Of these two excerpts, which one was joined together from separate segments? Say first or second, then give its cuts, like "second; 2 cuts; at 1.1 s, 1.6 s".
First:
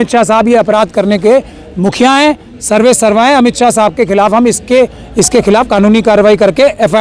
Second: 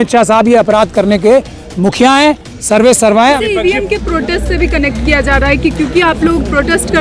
second; 1 cut; at 3.4 s